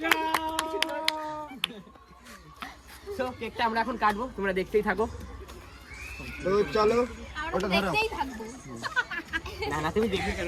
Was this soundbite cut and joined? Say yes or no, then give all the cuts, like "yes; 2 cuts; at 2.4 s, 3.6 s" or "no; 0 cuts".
no; 0 cuts